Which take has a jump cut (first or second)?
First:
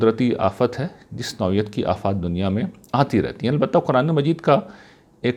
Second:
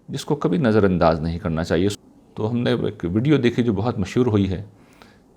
second